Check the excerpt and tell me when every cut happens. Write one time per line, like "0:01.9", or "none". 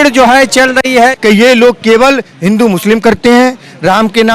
0:01.1